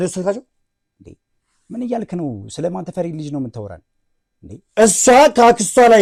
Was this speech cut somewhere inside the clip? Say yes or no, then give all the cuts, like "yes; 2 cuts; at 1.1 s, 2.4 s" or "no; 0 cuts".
no; 0 cuts